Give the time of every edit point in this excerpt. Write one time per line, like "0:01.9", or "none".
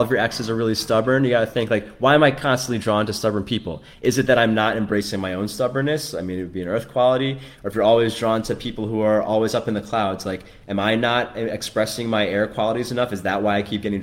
none